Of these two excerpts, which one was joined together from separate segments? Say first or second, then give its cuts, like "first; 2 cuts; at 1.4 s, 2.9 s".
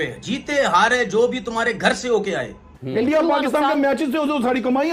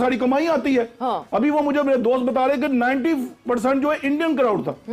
first; 1 cut; at 2.7 s